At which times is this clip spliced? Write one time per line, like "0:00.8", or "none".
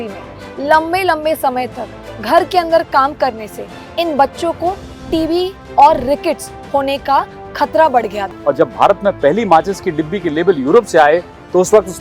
0:08.2